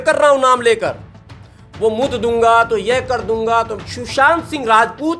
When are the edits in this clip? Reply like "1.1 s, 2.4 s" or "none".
3.8 s